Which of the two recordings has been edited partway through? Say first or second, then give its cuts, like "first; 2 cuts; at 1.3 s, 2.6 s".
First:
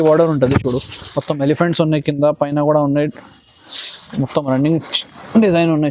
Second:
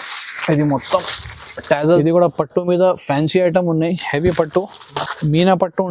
second; 1 cut; at 1.8 s